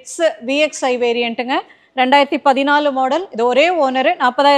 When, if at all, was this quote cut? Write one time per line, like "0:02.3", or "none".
none